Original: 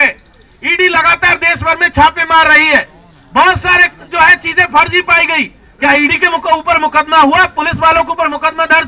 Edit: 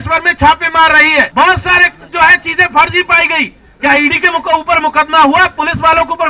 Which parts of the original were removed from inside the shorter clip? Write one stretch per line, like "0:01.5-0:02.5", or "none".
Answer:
0:02.8-0:03.3